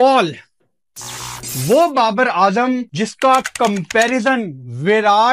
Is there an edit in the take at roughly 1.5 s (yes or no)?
no